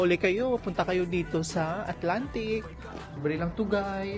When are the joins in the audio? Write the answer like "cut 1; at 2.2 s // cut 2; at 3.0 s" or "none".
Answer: cut 1; at 3.1 s